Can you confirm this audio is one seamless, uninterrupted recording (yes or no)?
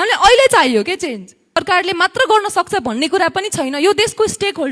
no